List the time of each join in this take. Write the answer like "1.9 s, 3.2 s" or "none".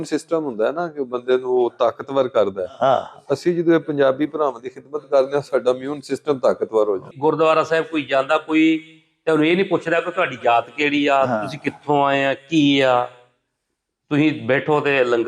7.1 s